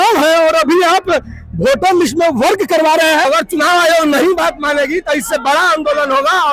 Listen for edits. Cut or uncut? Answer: cut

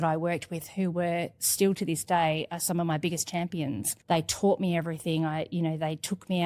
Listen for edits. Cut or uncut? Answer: uncut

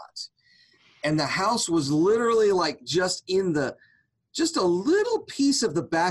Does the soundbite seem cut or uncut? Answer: uncut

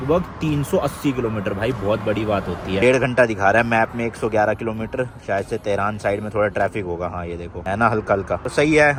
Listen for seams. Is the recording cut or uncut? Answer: uncut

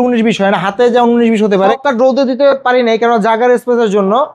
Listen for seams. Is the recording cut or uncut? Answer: cut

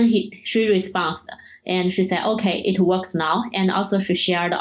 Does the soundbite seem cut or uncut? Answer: uncut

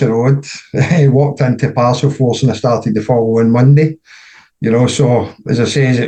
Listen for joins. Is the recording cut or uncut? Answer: uncut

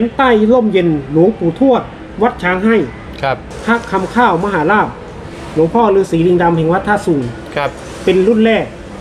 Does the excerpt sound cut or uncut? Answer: cut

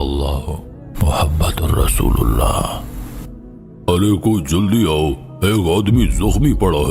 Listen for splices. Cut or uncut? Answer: uncut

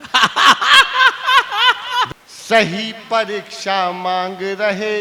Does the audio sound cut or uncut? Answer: cut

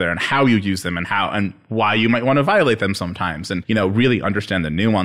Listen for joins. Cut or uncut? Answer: cut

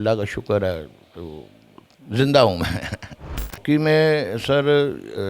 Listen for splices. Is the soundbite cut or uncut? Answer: cut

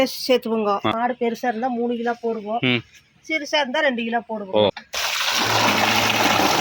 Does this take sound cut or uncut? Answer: cut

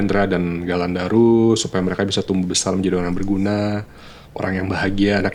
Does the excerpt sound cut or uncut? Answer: uncut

